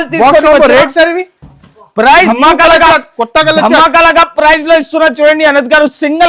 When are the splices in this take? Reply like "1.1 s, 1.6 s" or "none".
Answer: 2.3 s